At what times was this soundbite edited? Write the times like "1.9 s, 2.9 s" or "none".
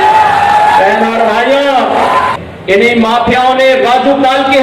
2.4 s